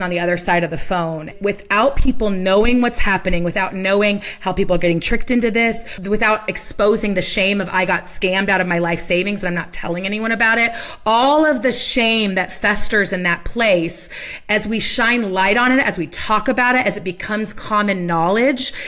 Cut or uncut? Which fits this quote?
cut